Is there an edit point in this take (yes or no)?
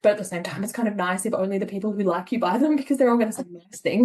no